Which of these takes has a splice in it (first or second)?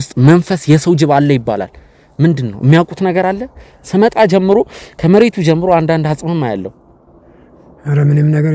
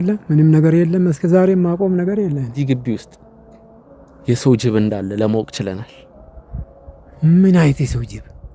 second